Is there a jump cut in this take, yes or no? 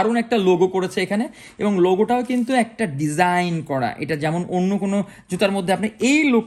no